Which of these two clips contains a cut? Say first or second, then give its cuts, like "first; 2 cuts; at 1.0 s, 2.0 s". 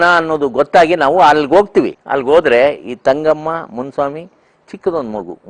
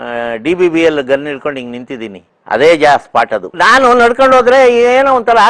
first; 1 cut; at 2.0 s